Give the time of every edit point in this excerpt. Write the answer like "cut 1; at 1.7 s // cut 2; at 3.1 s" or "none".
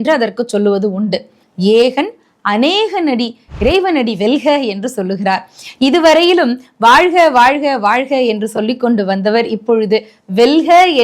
cut 1; at 1.4 s